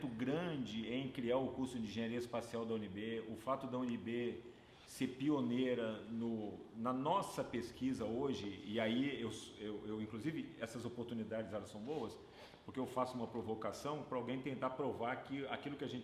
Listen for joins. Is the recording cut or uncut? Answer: uncut